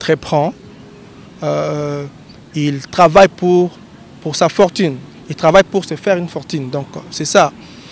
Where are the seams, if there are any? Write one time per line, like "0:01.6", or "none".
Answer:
none